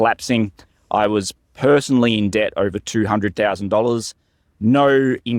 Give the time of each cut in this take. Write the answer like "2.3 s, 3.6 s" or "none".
none